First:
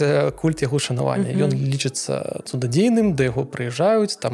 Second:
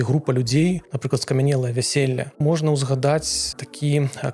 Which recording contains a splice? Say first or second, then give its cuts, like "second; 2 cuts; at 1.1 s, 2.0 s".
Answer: second; 3 cuts; at 0.9 s, 2.4 s, 3.5 s